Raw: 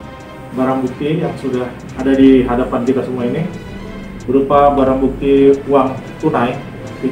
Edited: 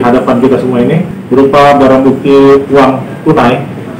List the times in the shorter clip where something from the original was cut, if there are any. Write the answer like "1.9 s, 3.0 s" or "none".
1.1 s